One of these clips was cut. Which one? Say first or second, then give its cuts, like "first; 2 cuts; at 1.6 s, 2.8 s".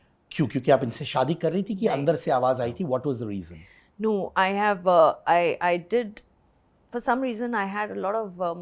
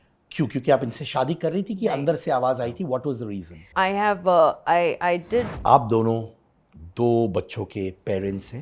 second; 2 cuts; at 3.7 s, 5.5 s